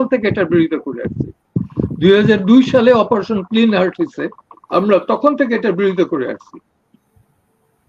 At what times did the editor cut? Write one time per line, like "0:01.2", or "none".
none